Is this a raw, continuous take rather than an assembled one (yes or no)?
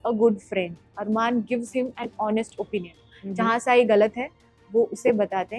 yes